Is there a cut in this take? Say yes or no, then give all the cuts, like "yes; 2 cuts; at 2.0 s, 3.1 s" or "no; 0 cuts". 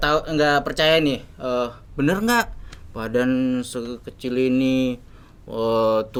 no; 0 cuts